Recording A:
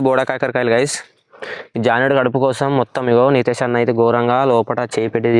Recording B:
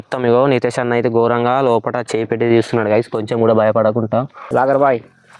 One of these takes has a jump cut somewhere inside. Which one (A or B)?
B